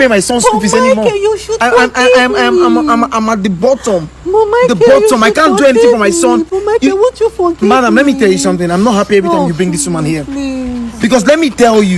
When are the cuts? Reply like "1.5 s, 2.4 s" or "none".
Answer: none